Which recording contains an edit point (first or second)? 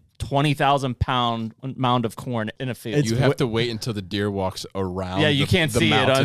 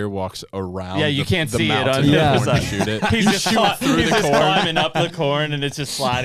first